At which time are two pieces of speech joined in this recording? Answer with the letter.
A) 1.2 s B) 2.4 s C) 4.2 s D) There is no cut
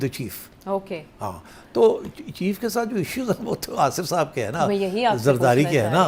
D